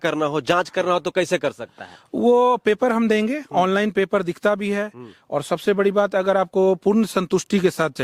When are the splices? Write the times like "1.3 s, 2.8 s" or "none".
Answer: none